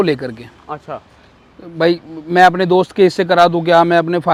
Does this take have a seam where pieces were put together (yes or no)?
no